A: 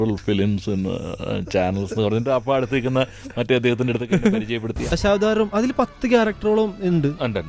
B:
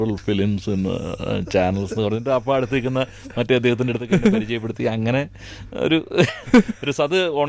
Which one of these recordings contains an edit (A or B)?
A